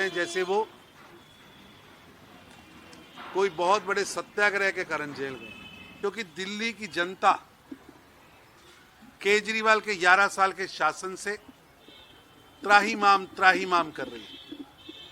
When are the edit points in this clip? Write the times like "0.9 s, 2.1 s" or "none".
6.0 s